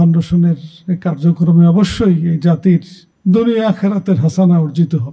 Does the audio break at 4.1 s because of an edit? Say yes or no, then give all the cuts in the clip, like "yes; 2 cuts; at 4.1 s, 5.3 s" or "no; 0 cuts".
no; 0 cuts